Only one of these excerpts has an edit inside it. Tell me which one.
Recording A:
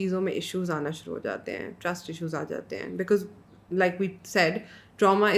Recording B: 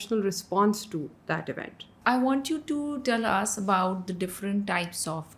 B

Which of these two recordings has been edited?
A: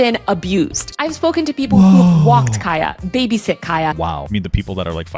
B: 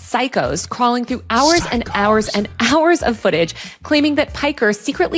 A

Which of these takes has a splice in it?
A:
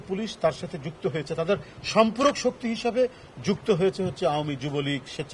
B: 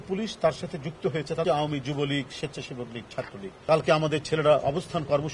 B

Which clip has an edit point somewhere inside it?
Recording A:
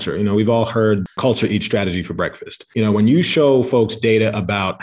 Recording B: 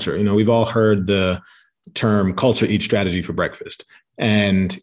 A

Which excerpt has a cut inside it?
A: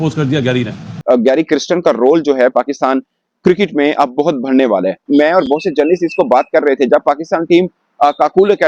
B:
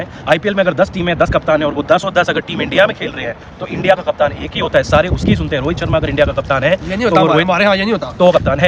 A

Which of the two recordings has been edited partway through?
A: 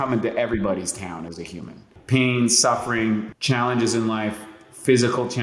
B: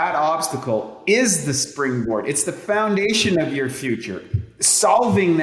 A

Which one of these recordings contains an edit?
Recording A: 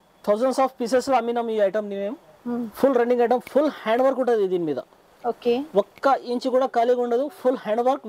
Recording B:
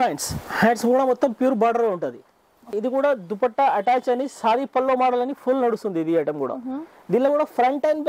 B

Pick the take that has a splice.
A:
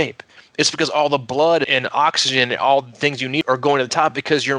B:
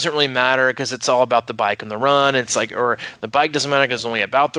A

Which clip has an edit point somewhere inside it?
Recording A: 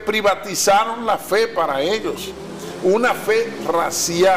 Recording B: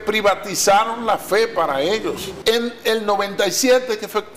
B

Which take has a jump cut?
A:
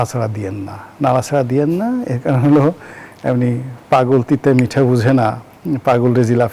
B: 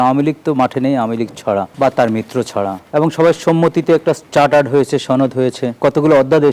B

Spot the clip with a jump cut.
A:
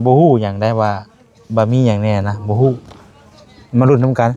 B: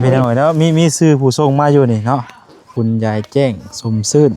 B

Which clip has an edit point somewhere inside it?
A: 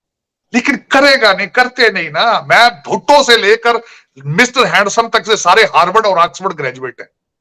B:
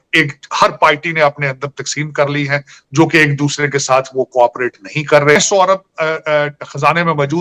B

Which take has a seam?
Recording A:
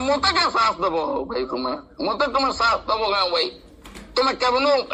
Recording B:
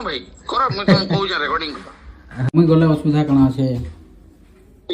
B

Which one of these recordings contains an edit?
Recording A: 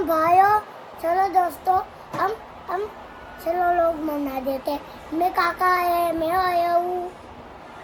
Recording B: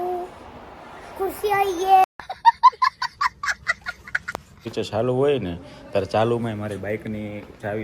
B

